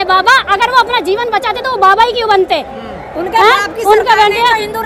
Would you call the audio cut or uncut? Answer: uncut